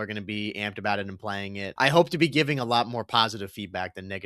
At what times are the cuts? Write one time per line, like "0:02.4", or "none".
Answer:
0:01.7